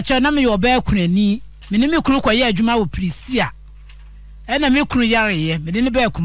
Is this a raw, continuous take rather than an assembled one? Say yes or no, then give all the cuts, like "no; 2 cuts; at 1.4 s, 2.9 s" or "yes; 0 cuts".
no; 1 cut; at 1.5 s